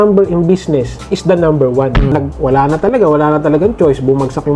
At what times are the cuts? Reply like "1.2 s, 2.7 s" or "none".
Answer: 2.1 s

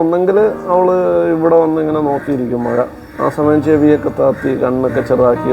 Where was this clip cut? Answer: none

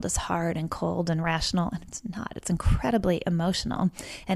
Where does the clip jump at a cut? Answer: none

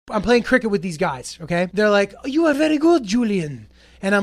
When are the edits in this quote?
1.7 s

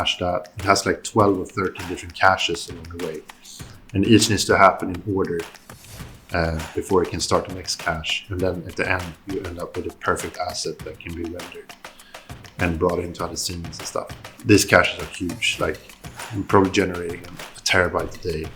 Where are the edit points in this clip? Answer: 14.2 s

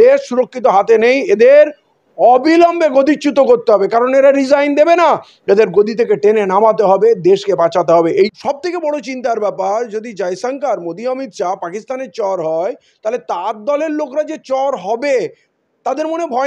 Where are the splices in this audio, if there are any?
8.3 s

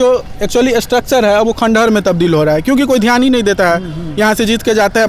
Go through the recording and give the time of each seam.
none

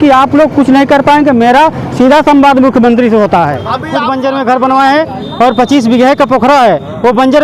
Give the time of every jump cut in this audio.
3.9 s

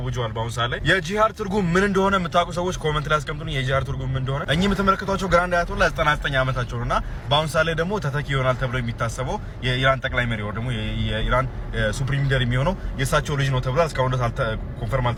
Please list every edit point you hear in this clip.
none

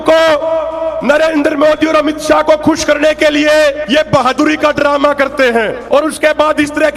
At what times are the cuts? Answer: 3.8 s, 5.8 s

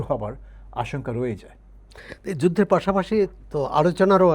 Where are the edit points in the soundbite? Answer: none

